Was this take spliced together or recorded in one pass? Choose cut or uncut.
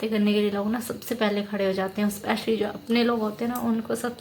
uncut